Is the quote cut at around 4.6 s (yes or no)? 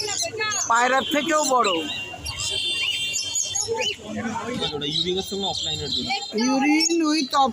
yes